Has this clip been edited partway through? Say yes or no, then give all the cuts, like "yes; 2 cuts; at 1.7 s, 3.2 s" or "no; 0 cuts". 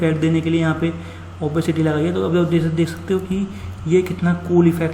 no; 0 cuts